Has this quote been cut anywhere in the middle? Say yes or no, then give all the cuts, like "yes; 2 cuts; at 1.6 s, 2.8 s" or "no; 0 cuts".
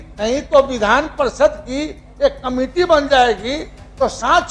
no; 0 cuts